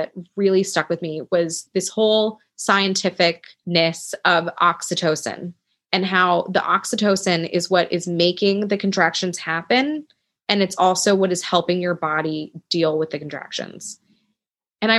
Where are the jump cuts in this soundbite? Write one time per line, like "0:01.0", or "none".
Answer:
0:01.6
0:03.5